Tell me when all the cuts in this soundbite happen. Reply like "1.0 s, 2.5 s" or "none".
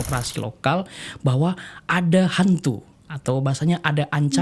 none